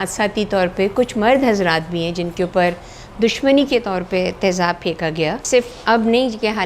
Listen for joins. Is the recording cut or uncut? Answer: cut